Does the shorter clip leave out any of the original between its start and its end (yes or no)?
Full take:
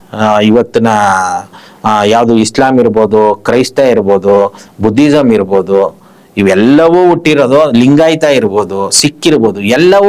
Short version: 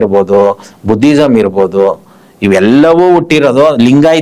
no